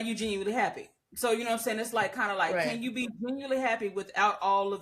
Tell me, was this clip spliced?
no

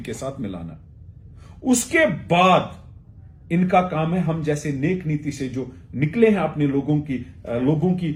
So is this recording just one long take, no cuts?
yes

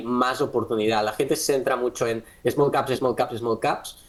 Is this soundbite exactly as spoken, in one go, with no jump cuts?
yes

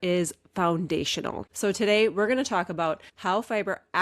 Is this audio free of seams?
no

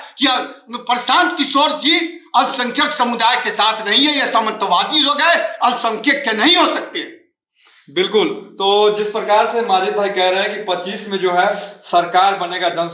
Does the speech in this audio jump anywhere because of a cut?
no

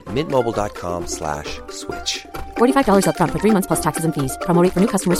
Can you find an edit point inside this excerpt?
no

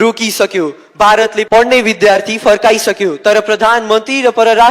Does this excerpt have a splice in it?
yes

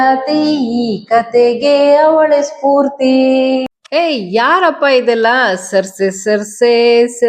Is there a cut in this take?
yes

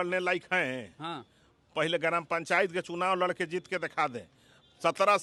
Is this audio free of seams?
yes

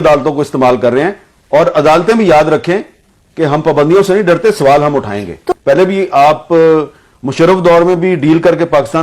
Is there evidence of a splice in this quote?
yes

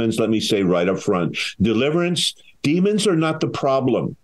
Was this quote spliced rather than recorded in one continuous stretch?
yes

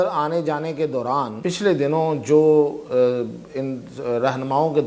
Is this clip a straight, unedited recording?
no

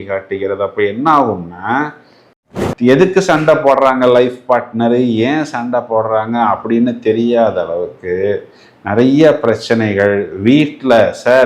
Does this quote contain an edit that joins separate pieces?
yes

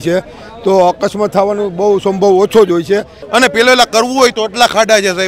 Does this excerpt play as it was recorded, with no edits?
no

